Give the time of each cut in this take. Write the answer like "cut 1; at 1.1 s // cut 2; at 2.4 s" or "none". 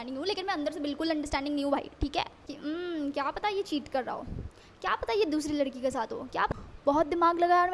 cut 1; at 2.5 s // cut 2; at 6.5 s